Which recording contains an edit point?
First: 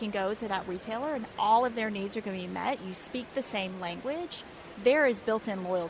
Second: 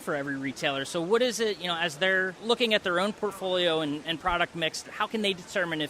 second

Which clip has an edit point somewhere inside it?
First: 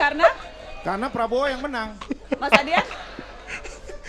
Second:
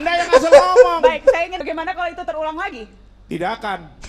second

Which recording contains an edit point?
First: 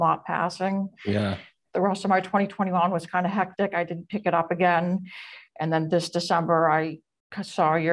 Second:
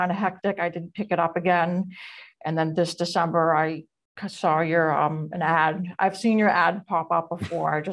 first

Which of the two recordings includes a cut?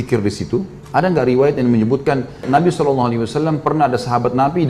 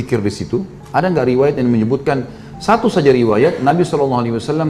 first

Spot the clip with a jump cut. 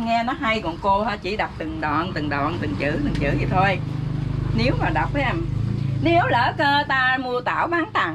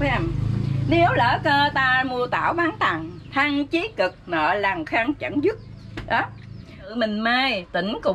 second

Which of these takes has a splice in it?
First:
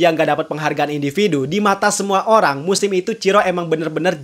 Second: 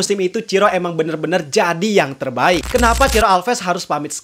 second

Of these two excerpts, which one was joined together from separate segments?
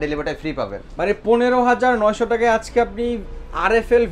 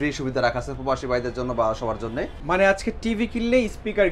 second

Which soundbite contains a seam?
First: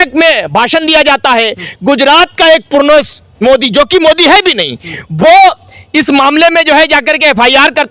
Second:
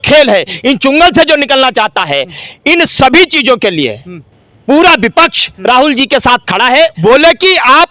second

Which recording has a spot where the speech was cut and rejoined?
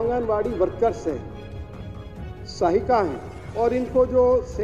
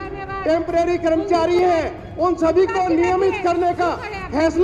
first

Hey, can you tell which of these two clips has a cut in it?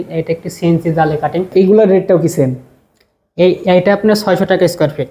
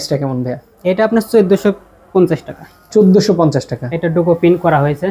first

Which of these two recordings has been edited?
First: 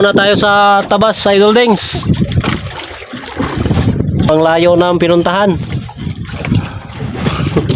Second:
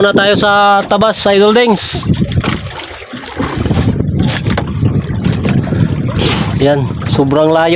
first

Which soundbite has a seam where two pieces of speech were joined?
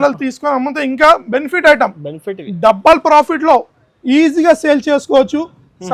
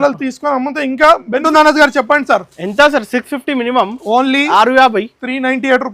second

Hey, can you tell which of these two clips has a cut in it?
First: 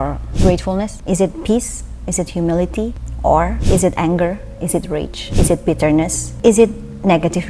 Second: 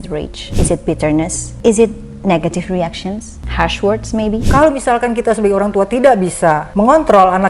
second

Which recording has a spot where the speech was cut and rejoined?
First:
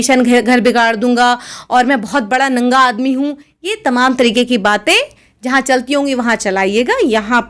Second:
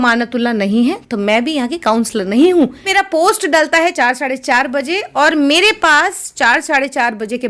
second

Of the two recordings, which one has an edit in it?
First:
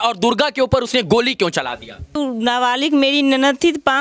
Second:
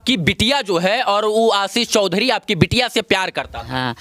first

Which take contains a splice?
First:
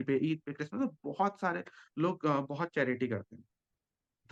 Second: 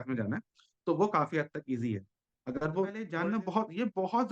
second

